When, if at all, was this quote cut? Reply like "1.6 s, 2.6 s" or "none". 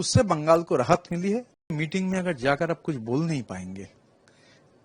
1.8 s